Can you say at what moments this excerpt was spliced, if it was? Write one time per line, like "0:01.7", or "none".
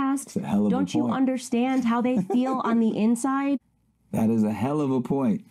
0:03.7